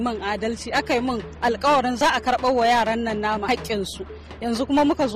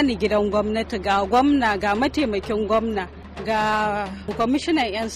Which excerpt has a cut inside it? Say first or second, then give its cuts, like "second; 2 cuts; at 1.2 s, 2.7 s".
first; 2 cuts; at 2.0 s, 3.5 s